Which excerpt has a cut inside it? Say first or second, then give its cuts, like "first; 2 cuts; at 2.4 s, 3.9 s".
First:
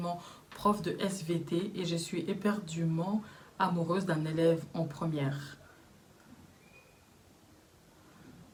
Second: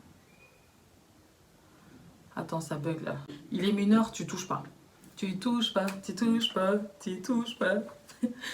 second; 1 cut; at 3.3 s